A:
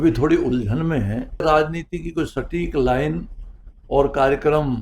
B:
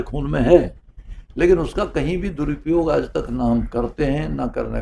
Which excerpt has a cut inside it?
A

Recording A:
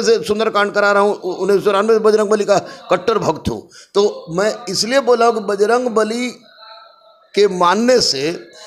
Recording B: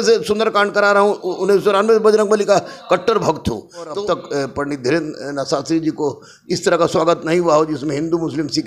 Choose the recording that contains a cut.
B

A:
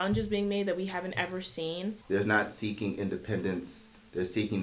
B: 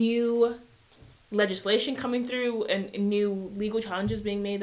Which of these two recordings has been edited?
A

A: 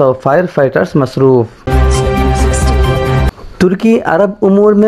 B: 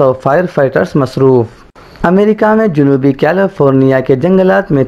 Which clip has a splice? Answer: A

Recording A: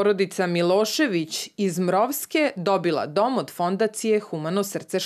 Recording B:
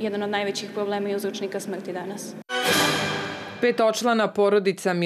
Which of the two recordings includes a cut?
B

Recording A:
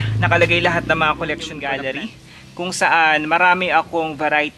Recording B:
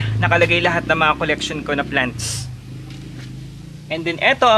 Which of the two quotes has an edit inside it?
A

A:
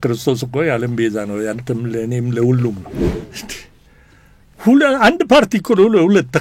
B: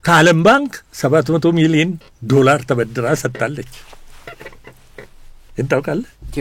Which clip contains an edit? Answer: A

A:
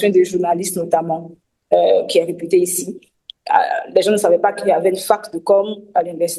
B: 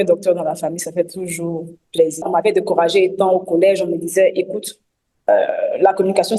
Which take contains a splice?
B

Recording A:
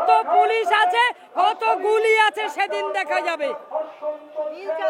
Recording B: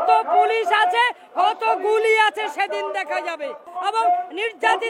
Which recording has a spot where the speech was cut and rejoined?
B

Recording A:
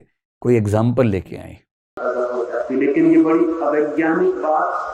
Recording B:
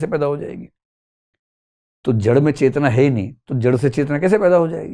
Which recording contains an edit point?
A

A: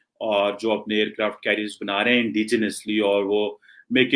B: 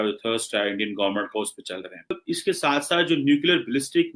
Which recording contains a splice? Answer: B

